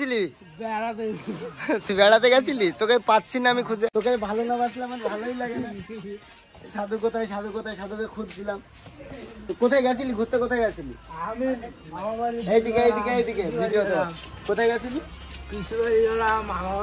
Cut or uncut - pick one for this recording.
uncut